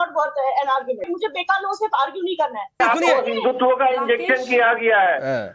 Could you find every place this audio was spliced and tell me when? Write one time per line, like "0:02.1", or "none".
0:01.1
0:02.8